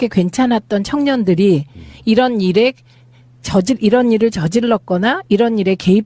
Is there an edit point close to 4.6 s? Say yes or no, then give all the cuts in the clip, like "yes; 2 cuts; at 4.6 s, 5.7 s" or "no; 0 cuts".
yes; 1 cut; at 4.6 s